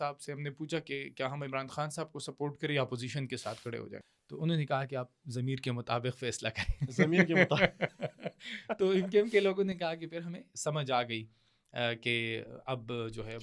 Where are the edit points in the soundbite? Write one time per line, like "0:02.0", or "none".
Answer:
0:04.2